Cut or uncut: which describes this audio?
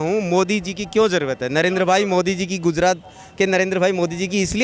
uncut